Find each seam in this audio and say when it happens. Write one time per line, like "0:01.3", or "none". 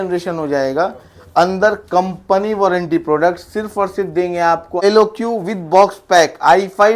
0:04.7